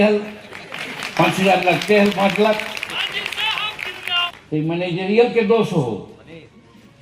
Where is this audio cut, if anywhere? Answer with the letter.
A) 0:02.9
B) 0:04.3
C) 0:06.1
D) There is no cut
B